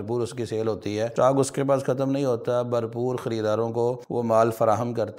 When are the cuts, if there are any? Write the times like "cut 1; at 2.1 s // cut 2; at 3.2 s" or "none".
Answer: cut 1; at 1.1 s // cut 2; at 4.0 s